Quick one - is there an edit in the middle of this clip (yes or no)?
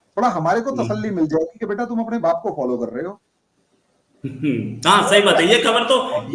no